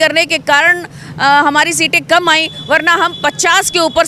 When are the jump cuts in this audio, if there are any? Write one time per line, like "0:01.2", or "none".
none